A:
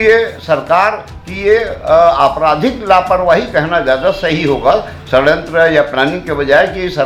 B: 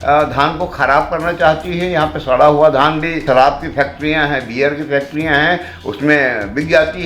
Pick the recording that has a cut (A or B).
B